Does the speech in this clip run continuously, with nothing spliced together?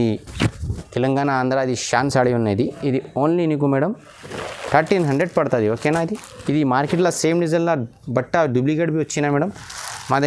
yes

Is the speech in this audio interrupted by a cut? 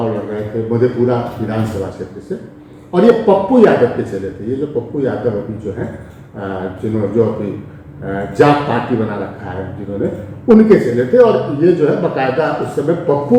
no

